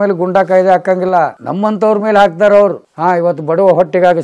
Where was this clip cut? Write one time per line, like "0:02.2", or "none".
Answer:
0:01.4
0:02.9